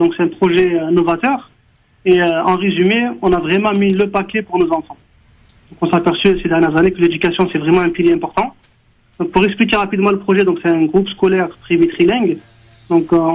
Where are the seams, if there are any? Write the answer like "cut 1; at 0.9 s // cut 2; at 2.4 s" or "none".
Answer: cut 1; at 4.5 s